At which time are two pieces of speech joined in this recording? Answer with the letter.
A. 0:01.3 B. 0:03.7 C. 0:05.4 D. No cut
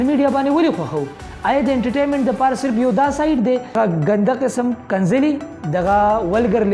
B